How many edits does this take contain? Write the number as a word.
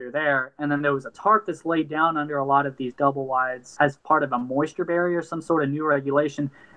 two